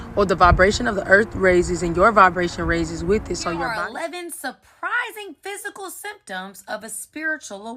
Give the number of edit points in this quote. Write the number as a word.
one